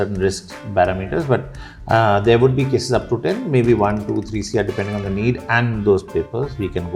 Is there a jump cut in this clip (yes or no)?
no